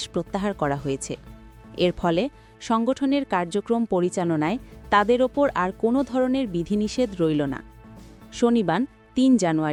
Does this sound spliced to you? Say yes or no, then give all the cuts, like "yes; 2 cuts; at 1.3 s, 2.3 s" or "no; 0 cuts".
no; 0 cuts